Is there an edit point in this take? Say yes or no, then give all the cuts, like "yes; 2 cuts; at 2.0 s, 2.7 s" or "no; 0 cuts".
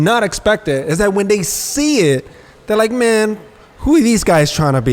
no; 0 cuts